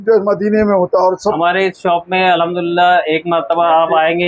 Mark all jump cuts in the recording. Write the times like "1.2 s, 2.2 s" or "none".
1.4 s